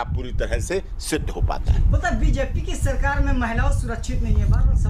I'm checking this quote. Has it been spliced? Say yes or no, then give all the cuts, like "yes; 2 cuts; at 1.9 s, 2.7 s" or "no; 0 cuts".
no; 0 cuts